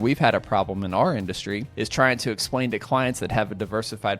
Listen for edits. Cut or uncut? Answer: cut